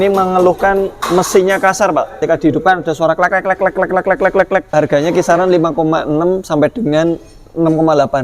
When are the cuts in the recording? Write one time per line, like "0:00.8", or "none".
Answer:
0:02.2
0:04.7